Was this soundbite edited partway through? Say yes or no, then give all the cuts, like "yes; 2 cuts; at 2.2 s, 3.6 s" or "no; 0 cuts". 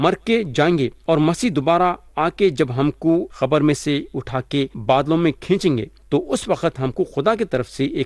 yes; 4 cuts; at 1.0 s, 3.3 s, 4.8 s, 5.9 s